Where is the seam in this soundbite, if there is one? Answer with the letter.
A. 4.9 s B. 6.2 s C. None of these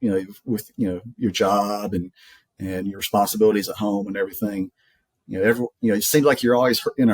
C